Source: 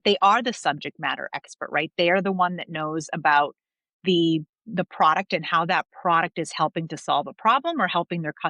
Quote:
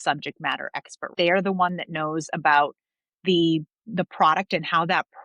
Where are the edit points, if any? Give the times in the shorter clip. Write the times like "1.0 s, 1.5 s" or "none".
1.1 s